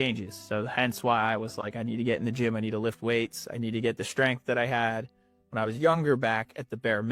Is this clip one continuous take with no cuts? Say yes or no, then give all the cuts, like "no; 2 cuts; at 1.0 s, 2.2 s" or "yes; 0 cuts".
yes; 0 cuts